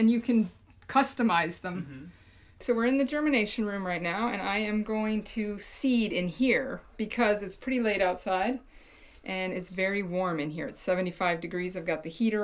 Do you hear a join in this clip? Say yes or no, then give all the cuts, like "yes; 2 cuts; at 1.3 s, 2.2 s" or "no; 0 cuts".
yes; 1 cut; at 2.6 s